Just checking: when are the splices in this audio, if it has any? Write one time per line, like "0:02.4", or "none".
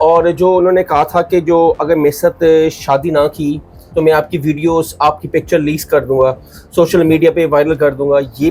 none